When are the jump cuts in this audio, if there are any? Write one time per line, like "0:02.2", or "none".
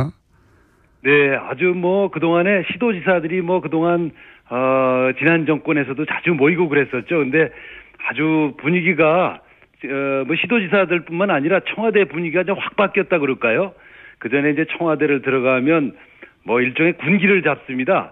none

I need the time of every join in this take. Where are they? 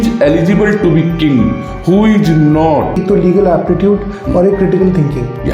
0:02.9

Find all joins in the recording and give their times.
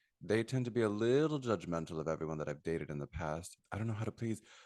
0:03.5

